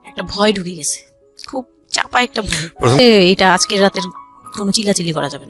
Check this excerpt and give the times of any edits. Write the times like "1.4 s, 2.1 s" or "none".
3.0 s